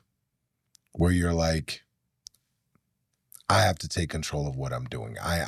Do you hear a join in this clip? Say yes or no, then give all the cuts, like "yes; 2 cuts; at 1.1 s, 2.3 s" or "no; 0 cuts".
no; 0 cuts